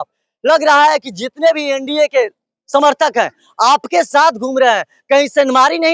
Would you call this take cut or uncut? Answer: uncut